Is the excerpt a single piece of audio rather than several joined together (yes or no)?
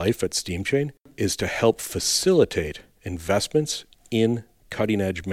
no